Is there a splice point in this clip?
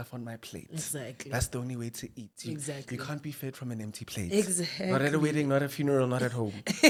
no; 0 cuts

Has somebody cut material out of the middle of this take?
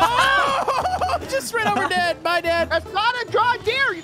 no; 0 cuts

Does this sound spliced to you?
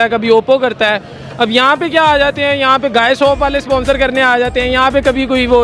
no; 0 cuts

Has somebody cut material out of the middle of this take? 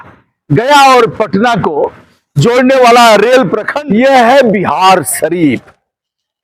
yes; 1 cut; at 3.7 s

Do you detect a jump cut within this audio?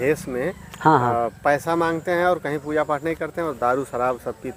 no; 0 cuts

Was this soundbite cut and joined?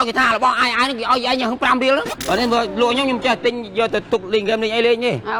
no; 0 cuts

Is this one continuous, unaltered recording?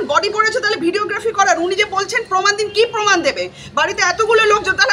yes; 0 cuts

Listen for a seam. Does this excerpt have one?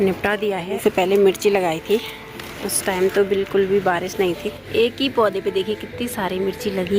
yes; 2 cuts; at 0.8 s, 4.6 s

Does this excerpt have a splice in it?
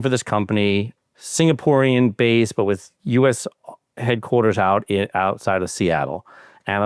yes; 1 cut; at 0.9 s

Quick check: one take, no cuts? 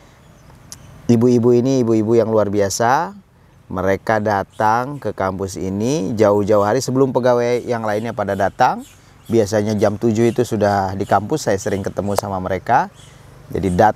yes; 0 cuts

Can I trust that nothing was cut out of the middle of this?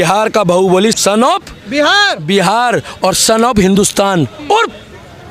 no; 1 cut; at 1.0 s

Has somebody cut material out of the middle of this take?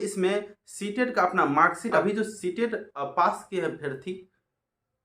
yes; 1 cut; at 2.0 s

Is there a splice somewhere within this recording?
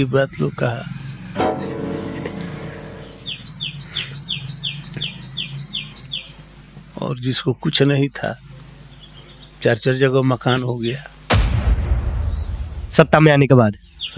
no; 0 cuts

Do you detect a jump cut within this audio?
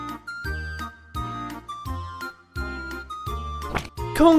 no; 0 cuts

